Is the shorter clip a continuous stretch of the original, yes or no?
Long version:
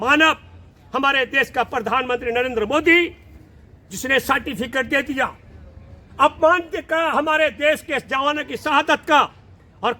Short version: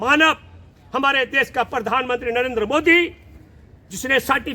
yes